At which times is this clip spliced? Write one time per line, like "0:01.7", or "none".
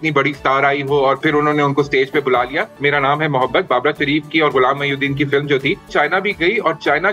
0:01.2
0:02.7
0:05.9